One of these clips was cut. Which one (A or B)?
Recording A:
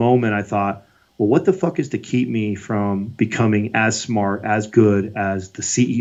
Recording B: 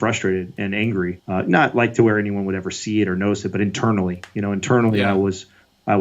B